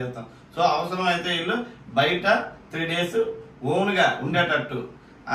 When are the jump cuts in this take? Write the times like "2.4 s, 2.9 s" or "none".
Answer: none